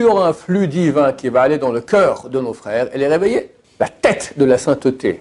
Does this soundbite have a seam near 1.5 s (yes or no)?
no